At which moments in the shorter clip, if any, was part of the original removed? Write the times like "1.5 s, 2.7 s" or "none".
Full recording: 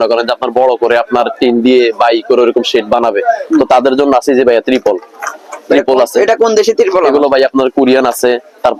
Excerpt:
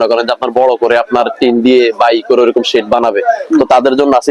none